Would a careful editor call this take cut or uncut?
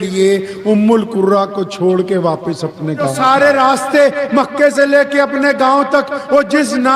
cut